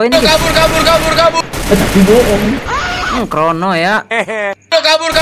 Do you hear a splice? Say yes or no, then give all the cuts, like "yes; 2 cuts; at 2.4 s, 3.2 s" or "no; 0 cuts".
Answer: no; 0 cuts